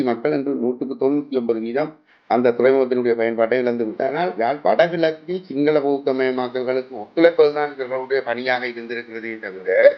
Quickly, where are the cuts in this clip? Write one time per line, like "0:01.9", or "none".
0:04.2